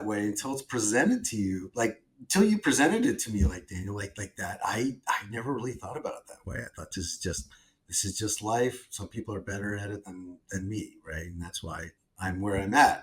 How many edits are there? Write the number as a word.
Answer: one